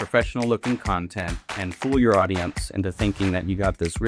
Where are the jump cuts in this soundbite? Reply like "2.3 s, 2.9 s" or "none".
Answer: none